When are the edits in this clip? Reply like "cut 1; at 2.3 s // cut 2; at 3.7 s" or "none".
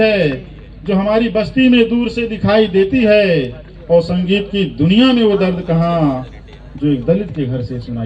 none